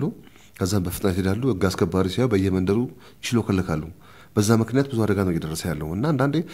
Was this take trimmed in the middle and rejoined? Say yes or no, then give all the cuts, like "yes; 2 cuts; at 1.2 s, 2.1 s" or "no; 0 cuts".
no; 0 cuts